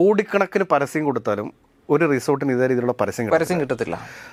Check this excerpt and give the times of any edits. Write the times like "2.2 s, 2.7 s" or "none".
none